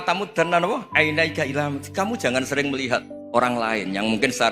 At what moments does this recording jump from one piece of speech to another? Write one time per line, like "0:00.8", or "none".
0:03.2